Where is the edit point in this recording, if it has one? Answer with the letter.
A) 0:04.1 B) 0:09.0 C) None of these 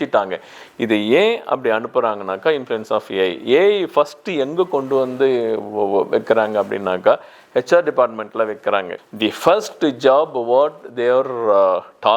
B